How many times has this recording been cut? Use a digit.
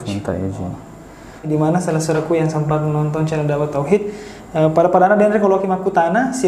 1